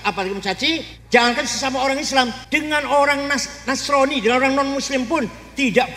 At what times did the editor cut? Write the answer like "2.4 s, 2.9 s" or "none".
0.9 s, 2.4 s

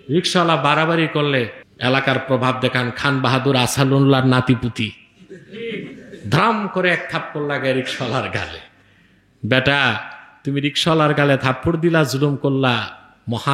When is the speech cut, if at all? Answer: 1.6 s

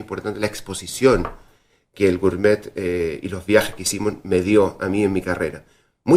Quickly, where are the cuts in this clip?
none

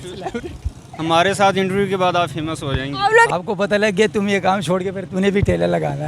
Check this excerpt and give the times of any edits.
3.3 s

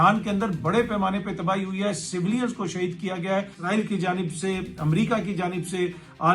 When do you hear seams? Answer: 3.6 s

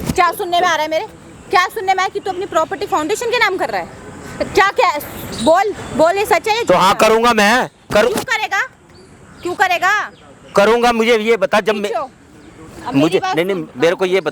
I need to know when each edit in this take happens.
none

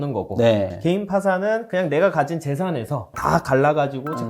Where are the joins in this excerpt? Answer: 3.1 s

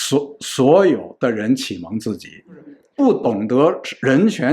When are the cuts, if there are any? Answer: 2.8 s

